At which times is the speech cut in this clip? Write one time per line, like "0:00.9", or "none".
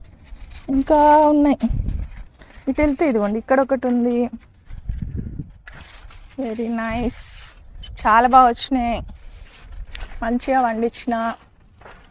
none

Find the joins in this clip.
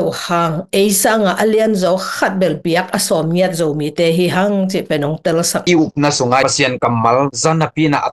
0:05.6
0:06.4

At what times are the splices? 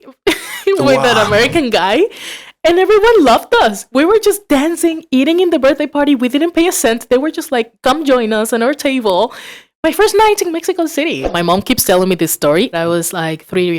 0:11.3
0:12.7

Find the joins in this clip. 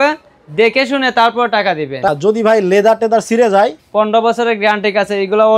0:02.1

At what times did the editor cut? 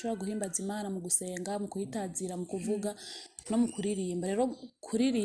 none

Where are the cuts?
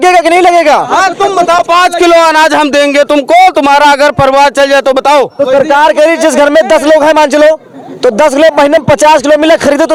none

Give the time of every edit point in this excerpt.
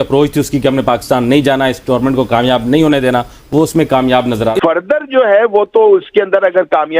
0:04.6

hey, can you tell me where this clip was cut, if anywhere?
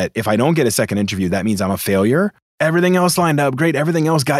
0:02.4

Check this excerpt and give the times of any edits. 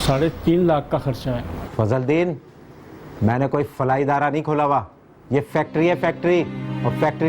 0:01.6

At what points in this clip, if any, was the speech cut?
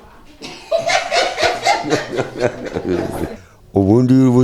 0:03.3

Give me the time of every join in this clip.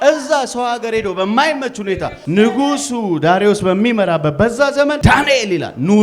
0:02.1
0:05.0

